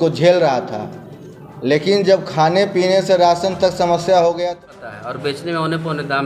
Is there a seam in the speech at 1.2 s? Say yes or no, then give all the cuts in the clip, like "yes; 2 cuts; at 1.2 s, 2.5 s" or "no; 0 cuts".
no; 1 cut; at 4.7 s